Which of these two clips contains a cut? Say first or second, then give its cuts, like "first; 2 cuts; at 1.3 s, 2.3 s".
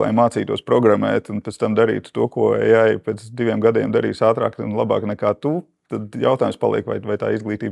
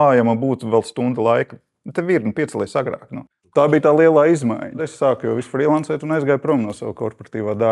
second; 2 cuts; at 3.5 s, 4.9 s